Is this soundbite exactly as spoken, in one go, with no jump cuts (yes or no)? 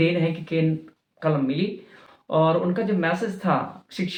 yes